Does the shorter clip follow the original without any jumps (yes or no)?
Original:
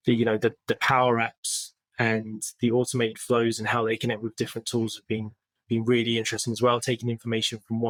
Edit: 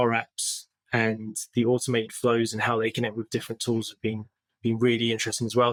yes